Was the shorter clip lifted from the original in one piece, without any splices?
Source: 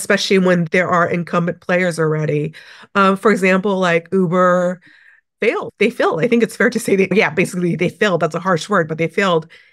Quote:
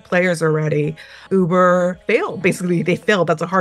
no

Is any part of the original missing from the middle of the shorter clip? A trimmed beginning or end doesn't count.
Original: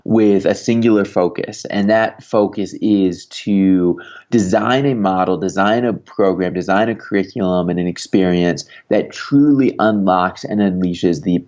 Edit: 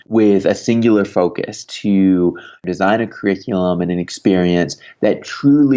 yes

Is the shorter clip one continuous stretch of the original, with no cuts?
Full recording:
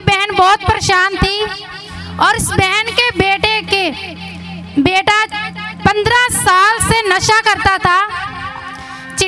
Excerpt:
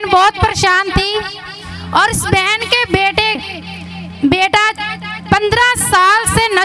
no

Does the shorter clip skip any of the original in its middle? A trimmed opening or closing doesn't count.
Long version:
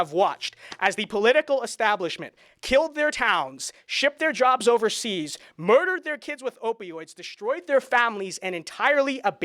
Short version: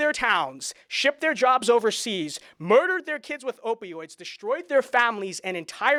no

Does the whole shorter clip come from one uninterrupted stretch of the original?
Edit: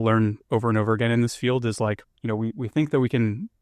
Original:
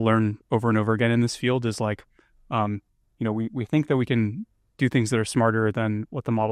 no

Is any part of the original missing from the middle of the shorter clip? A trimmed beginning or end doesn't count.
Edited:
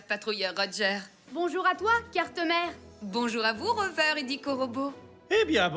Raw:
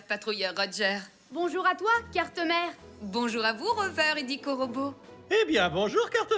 no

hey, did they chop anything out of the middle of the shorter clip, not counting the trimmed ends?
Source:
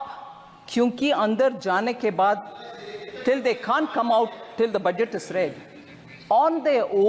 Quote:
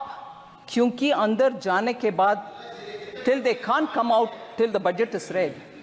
no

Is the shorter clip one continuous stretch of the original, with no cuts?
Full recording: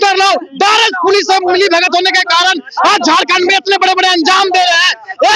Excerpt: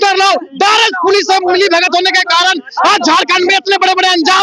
yes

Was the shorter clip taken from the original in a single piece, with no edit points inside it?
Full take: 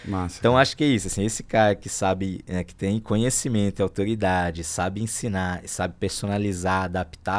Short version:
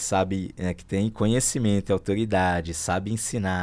yes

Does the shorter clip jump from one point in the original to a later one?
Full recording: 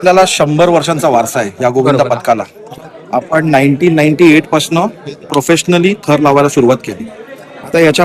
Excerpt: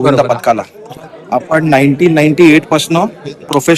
no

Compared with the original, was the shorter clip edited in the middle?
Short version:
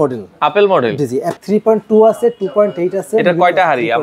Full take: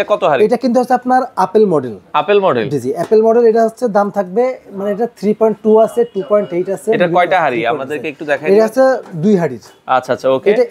yes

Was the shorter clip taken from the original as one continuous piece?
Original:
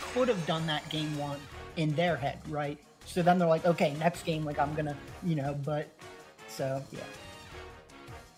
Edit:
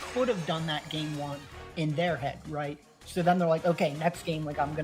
yes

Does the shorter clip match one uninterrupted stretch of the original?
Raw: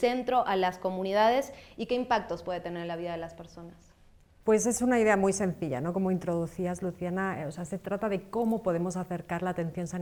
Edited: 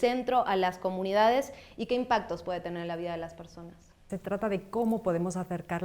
no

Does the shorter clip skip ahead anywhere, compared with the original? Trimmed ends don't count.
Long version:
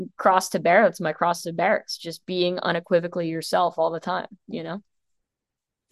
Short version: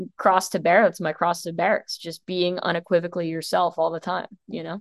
no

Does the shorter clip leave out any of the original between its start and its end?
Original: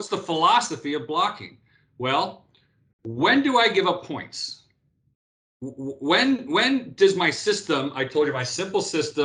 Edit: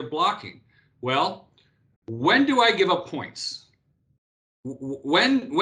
no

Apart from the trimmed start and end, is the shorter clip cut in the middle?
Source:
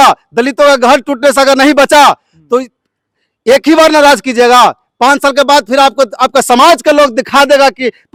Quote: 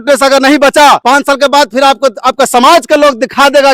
yes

